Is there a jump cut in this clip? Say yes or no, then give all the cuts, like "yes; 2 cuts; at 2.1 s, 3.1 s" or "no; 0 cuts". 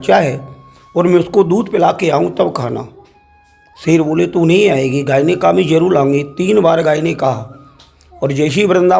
no; 0 cuts